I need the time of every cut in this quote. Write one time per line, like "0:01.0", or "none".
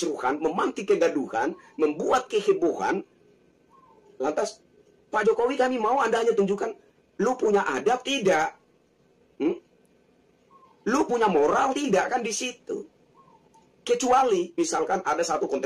none